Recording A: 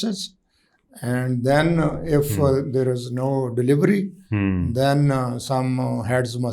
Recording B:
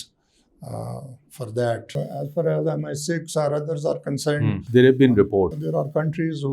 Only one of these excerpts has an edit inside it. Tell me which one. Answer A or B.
B